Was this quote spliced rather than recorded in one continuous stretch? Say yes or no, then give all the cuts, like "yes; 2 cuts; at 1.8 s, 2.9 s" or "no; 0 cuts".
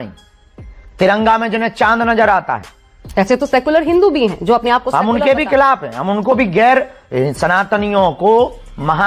no; 0 cuts